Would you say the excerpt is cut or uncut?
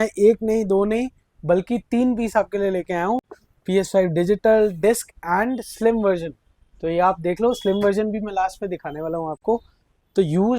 uncut